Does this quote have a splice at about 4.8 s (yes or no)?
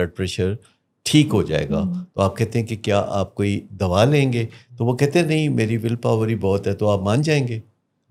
no